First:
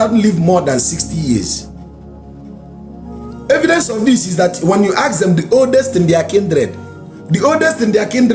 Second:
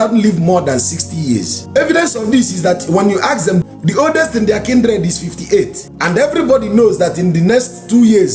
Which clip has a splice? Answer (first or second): second